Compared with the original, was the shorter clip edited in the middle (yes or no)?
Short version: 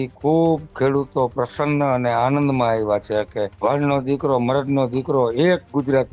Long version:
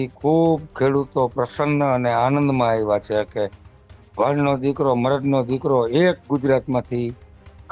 yes